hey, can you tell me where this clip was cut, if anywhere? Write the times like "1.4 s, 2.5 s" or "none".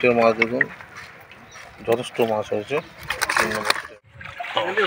3.8 s